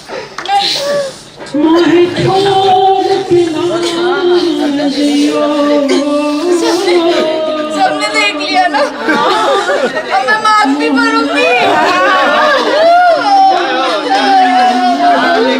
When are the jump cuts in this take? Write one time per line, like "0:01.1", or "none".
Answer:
none